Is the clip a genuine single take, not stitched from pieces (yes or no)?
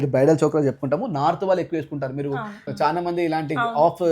no